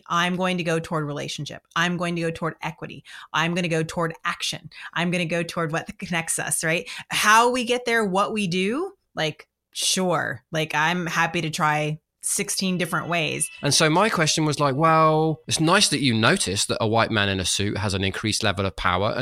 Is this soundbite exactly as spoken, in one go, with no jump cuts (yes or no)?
no